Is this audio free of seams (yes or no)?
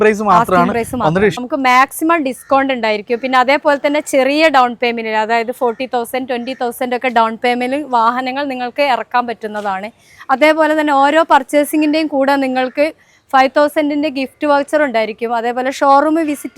no